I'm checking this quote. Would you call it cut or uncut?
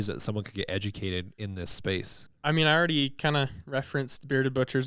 uncut